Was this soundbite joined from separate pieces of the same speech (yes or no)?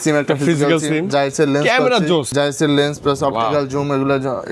yes